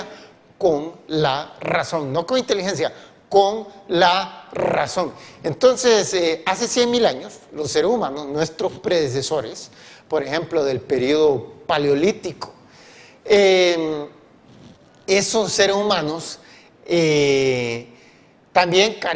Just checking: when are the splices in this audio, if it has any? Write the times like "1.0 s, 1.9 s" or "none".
none